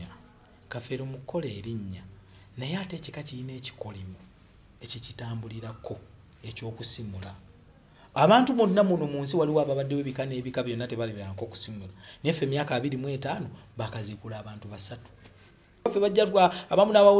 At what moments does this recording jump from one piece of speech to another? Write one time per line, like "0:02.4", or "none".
0:15.9